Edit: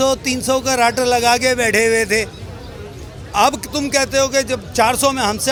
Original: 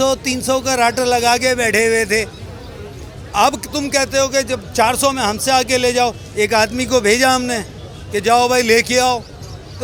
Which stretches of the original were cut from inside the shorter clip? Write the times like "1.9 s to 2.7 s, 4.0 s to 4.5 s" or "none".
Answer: none